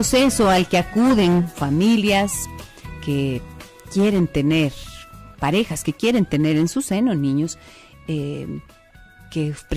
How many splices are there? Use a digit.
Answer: 1